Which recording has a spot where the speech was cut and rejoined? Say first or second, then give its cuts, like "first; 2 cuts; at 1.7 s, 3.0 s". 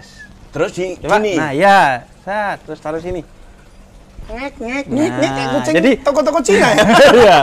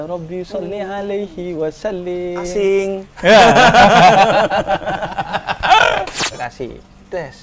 second; 1 cut; at 6.2 s